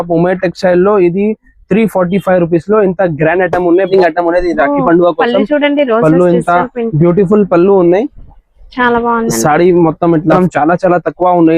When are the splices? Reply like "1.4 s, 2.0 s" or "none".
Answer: 3.9 s, 10.4 s